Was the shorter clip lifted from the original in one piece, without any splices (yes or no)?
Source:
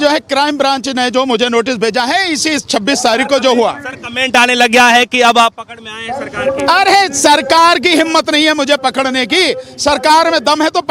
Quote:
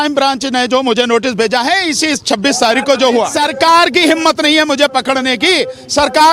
no